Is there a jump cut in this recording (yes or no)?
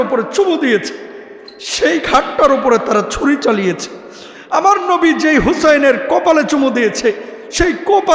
no